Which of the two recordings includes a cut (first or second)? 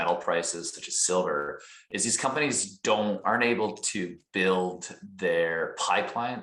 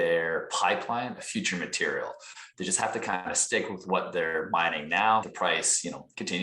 second